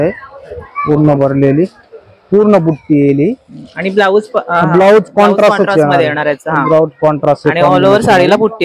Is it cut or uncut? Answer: uncut